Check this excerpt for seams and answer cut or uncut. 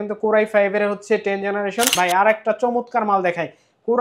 cut